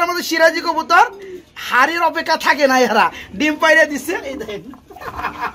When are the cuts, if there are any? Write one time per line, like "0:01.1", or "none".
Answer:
none